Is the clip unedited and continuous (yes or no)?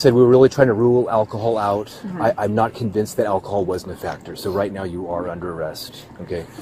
yes